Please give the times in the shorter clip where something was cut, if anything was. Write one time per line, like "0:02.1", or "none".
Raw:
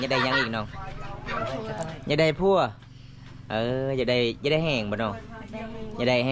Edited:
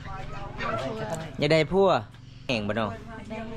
0:02.5